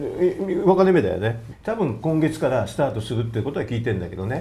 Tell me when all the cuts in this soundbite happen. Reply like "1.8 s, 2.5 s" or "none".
none